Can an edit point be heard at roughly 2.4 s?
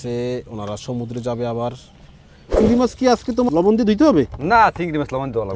no; 0 cuts

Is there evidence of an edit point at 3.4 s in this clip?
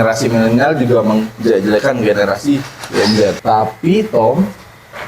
yes; 1 cut; at 3.4 s

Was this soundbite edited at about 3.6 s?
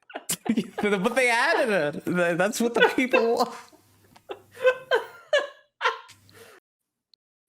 no; 1 cut; at 6.6 s

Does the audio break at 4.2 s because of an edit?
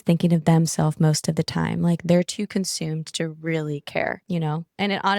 yes; 1 cut; at 4.2 s

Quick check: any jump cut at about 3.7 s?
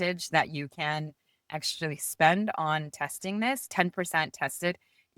yes; 1 cut; at 3.7 s

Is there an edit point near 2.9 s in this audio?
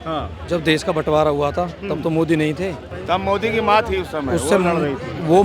yes; 1 cut; at 2.9 s

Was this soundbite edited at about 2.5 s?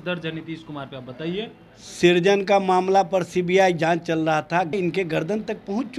no; 1 cut; at 4.7 s

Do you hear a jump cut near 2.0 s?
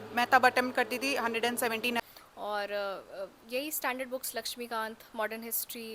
yes; 1 cut; at 2.0 s

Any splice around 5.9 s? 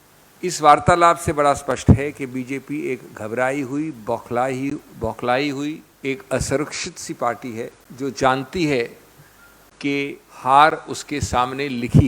yes; 3 cuts; at 5.9 s, 7.8 s, 10.3 s

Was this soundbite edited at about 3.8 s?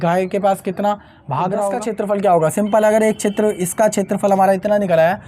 no; 1 cut; at 1.8 s

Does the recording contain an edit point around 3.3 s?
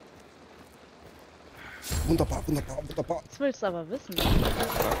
yes; 1 cut; at 3.3 s

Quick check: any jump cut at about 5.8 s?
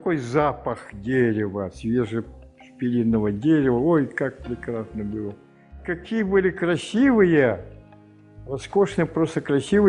yes; 1 cut; at 5.8 s

